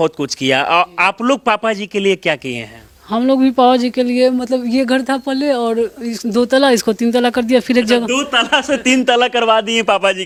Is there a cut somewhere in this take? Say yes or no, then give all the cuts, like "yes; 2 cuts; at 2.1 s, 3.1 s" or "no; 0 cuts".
no; 0 cuts